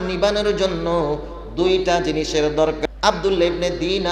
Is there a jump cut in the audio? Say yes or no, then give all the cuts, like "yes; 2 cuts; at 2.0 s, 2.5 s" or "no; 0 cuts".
yes; 1 cut; at 2.8 s